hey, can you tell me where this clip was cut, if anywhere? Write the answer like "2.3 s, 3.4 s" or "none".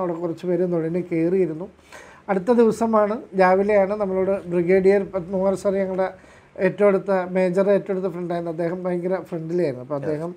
none